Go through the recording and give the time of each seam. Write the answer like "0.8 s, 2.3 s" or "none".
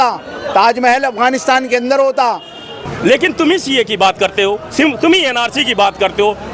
2.9 s

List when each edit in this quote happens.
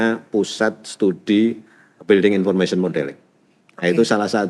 none

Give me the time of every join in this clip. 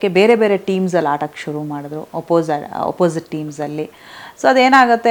none

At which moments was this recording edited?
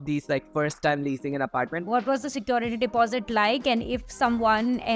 1.9 s

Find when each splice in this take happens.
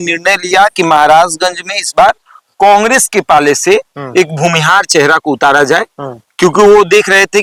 none

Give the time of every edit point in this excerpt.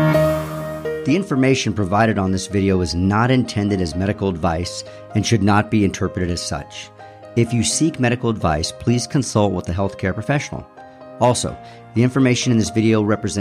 0.9 s

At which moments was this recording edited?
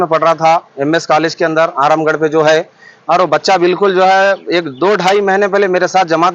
none

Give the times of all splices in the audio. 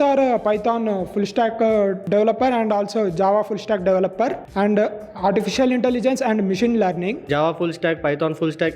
2.0 s, 4.4 s, 7.2 s

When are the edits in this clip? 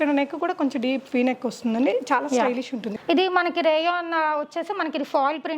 2.9 s

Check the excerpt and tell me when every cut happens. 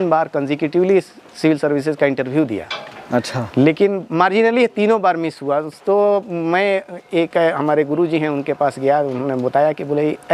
none

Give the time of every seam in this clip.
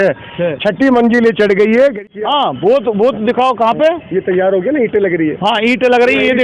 2.1 s

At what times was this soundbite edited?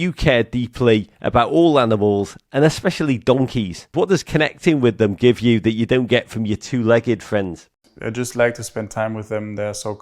3.9 s, 7.7 s

